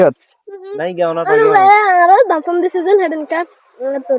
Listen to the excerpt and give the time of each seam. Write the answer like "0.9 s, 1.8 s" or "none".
none